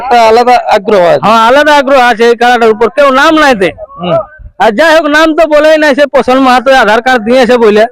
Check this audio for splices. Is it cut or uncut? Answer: uncut